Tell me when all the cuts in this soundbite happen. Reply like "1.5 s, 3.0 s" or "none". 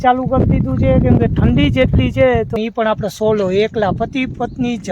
2.5 s